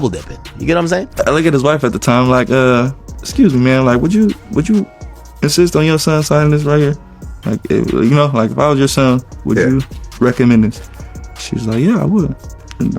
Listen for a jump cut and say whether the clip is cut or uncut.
cut